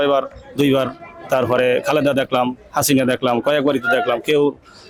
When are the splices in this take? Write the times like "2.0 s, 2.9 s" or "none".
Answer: none

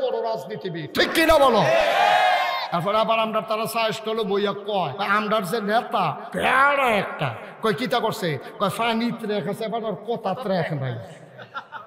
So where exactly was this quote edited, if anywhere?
2.7 s, 5.0 s

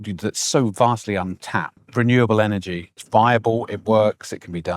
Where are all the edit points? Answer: 1.8 s, 3.0 s

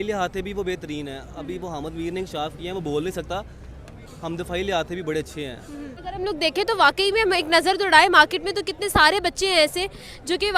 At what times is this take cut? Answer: 6.0 s

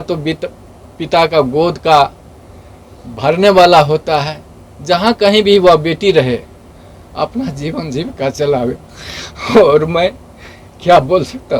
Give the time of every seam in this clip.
none

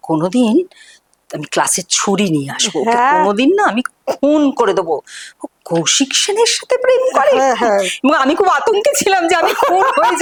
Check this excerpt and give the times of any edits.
none

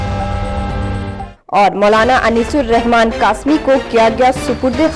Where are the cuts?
0.9 s

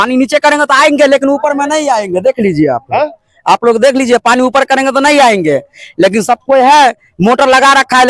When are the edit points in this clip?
none

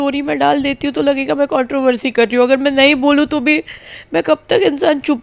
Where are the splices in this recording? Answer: none

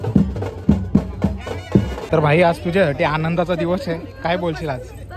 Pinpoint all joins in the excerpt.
2.0 s

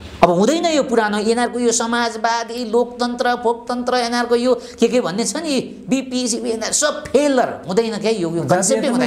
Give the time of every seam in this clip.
none

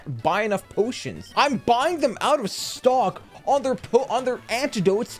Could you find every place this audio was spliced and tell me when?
1.1 s

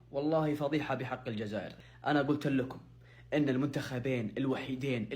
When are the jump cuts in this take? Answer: 1.7 s

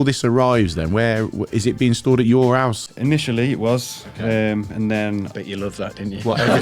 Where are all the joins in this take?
none

